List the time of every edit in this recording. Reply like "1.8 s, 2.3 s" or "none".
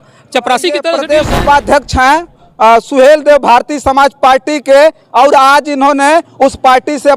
1.0 s